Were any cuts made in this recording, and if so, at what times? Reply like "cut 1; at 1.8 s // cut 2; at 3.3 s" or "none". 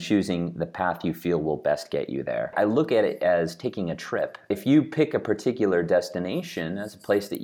cut 1; at 2.5 s // cut 2; at 4.5 s